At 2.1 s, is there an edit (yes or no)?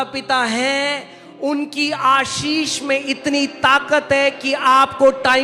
no